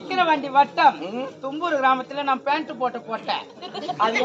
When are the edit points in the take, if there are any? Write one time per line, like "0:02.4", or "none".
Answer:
none